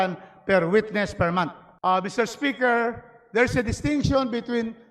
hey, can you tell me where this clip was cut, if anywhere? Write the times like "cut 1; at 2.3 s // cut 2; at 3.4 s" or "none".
cut 1; at 1.7 s